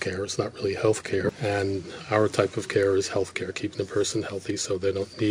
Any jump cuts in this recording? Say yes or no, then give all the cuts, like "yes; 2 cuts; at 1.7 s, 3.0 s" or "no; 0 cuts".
yes; 1 cut; at 1.3 s